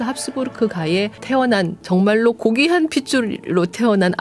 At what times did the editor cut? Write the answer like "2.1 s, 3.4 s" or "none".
1.4 s